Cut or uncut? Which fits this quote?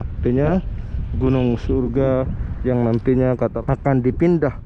cut